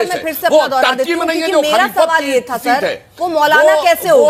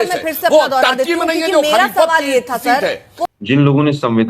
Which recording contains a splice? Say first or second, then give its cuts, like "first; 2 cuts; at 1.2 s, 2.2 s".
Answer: second; 1 cut; at 3.3 s